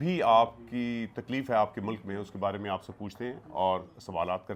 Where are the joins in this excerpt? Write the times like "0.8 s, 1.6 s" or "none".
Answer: none